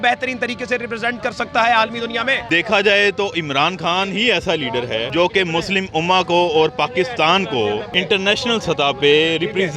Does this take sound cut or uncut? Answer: cut